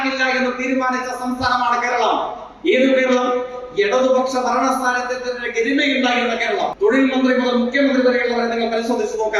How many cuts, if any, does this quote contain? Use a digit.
1